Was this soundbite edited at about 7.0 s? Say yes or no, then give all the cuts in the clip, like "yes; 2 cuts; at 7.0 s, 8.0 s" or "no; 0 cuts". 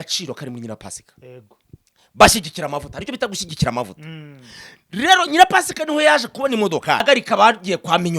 yes; 1 cut; at 7.0 s